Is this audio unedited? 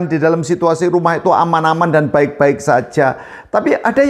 yes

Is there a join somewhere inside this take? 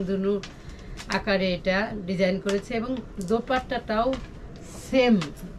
no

